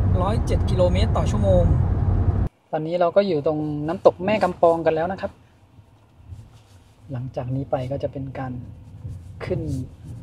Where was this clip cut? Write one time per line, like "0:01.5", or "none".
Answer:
0:02.5